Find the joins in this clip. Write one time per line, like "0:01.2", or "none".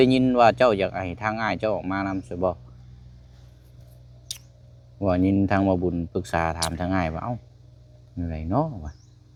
none